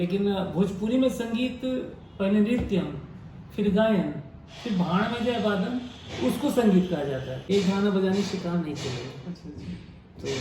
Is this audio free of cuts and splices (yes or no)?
no